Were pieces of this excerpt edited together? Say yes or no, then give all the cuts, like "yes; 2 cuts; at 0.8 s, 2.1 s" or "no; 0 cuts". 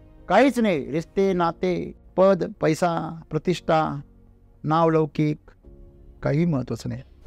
yes; 1 cut; at 2.0 s